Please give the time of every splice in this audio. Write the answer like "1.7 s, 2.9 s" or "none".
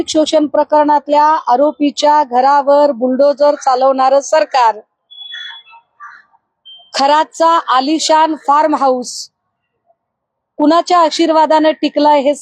none